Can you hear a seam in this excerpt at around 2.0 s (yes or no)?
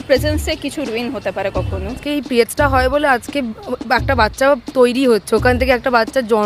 yes